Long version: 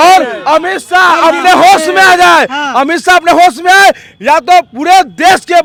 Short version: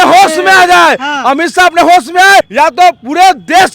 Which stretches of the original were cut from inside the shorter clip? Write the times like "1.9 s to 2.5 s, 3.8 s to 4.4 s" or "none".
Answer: 4.0 s to 4.2 s